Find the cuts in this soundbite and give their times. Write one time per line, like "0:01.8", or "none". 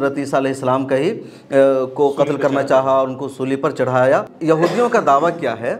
0:04.3